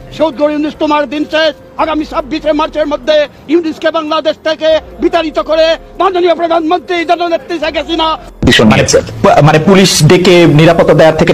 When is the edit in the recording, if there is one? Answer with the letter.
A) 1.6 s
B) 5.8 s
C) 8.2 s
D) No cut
C